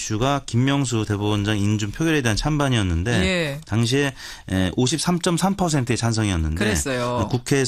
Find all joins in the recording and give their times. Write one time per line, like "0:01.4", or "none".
0:02.6